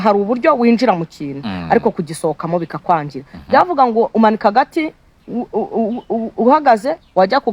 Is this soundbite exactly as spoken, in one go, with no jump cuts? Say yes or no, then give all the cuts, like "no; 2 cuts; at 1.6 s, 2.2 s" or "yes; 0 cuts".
yes; 0 cuts